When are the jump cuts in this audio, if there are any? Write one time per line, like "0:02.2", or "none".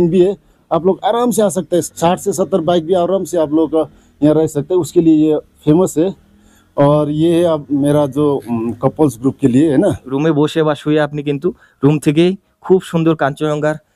0:01.9
0:10.1